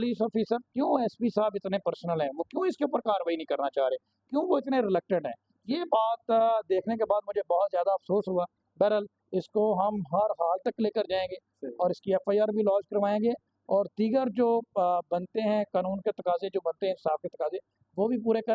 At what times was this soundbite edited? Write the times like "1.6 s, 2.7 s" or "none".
none